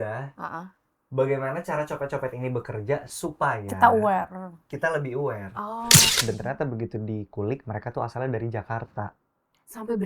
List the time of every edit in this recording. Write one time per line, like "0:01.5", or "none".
0:06.1